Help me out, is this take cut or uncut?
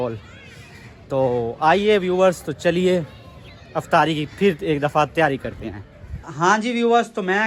uncut